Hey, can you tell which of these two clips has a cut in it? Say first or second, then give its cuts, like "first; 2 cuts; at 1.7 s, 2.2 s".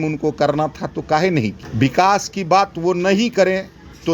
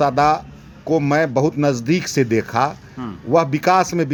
first; 1 cut; at 1.6 s